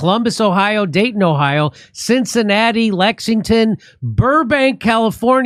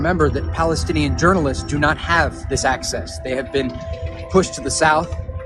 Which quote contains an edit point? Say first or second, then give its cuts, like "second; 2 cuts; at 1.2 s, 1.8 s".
second; 1 cut; at 3.5 s